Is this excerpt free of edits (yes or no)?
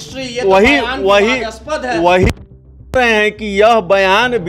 yes